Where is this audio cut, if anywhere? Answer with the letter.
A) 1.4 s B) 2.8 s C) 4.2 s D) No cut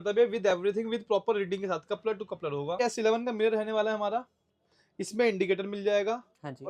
B